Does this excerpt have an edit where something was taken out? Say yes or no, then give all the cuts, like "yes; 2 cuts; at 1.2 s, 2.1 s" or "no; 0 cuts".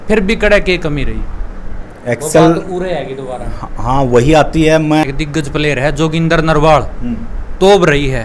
yes; 1 cut; at 5.0 s